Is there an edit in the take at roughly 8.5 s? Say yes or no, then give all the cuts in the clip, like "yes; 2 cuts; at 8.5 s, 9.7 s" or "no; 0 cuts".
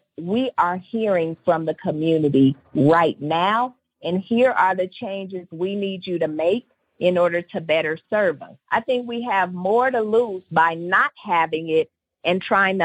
yes; 1 cut; at 8.5 s